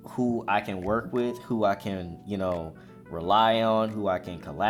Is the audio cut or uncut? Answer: uncut